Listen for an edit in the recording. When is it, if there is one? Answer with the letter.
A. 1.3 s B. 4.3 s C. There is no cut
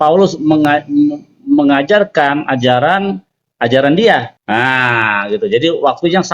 B